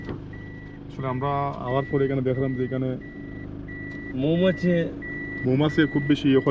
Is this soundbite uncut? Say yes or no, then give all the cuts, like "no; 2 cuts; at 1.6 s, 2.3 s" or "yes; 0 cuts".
yes; 0 cuts